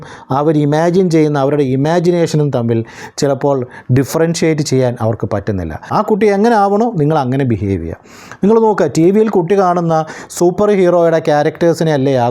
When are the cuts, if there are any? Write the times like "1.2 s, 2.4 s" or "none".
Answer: 5.8 s